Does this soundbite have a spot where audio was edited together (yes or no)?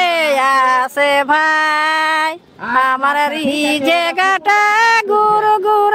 no